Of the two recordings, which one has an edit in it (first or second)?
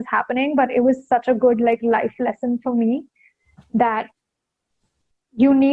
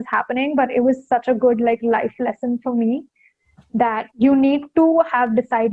second